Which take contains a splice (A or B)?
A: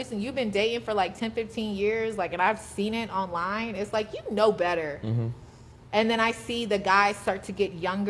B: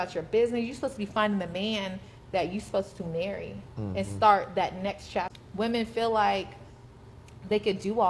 B